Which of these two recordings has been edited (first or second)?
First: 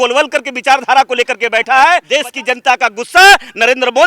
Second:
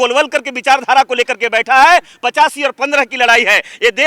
first